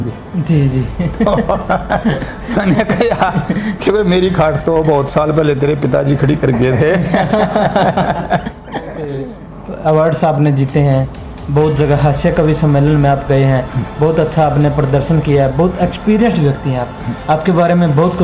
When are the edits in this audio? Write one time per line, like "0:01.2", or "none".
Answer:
0:09.0